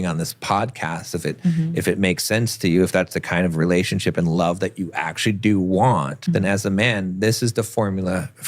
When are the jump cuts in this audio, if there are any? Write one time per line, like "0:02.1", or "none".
0:06.1